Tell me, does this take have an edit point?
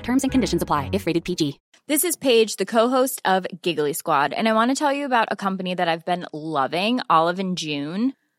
yes; 1 cut; at 1.7 s

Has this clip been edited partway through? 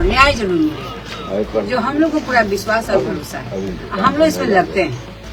no; 0 cuts

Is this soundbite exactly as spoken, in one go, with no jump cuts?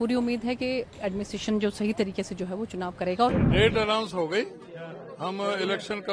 no; 1 cut; at 3.3 s

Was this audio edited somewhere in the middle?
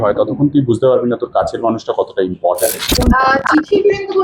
yes; 1 cut; at 2.9 s

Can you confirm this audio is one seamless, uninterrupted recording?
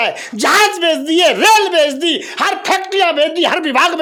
yes; 0 cuts

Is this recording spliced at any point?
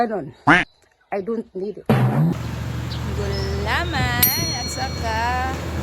yes; 1 cut; at 2.3 s

